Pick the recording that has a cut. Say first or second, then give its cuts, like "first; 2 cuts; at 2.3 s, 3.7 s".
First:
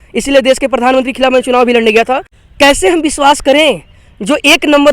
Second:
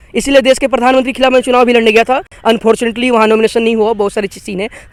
first; 1 cut; at 2.3 s